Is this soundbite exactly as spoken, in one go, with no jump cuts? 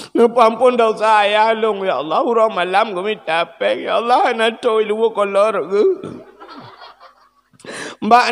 yes; 0 cuts

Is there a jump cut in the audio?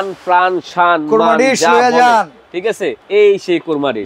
yes; 1 cut; at 3.0 s

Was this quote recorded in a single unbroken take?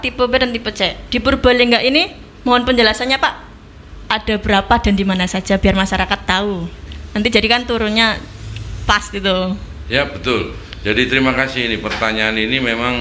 yes; 0 cuts

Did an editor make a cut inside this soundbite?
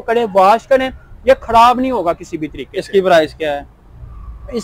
no; 0 cuts

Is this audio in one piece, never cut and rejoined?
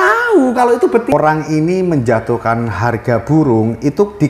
no; 1 cut; at 1.1 s

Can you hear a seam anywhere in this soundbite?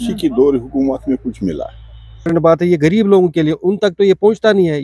yes; 1 cut; at 2.3 s

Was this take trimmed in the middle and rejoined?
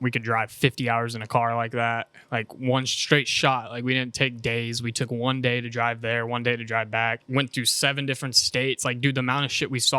yes; 1 cut; at 7.2 s

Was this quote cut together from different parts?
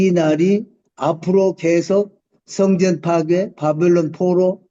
no; 0 cuts

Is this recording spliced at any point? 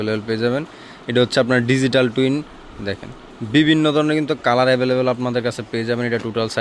no; 0 cuts

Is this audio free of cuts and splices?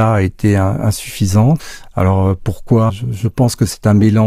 no; 2 cuts; at 1.8 s, 2.9 s

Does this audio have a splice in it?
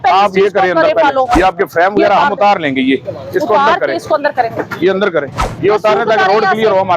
yes; 2 cuts; at 1.3 s, 5.5 s

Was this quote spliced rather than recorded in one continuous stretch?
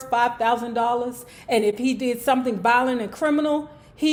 no; 0 cuts

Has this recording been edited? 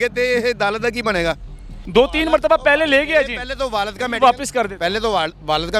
yes; 1 cut; at 1.7 s

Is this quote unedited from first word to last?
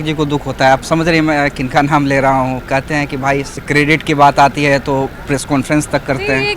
yes; 0 cuts

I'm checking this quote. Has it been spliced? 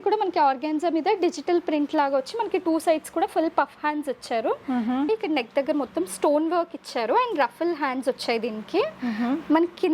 yes; 1 cut; at 5.1 s

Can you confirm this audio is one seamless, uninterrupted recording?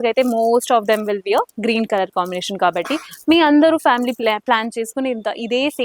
yes; 0 cuts

